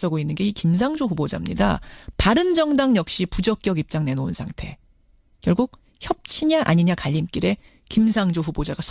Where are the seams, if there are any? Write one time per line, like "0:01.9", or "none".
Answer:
0:05.3